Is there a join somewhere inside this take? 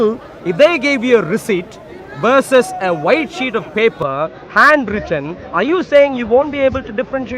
no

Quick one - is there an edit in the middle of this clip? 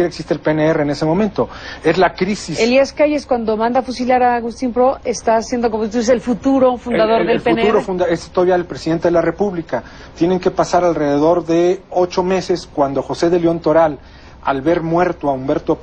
yes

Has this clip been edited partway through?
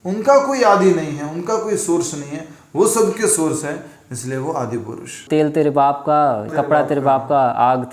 yes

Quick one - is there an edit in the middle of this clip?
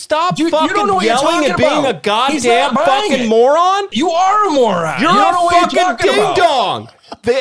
yes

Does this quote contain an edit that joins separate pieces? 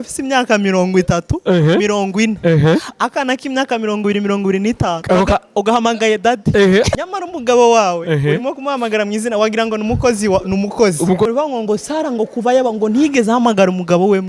yes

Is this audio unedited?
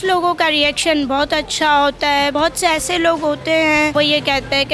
no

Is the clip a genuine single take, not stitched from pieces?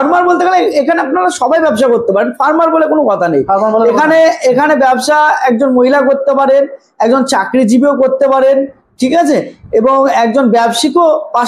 yes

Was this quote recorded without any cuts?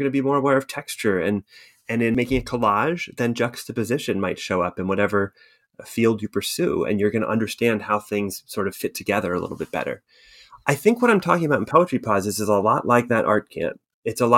no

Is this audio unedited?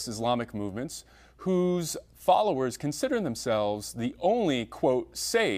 yes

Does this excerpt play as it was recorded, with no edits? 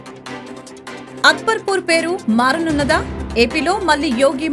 no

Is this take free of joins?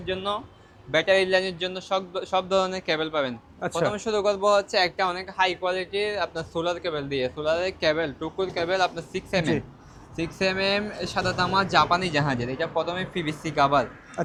yes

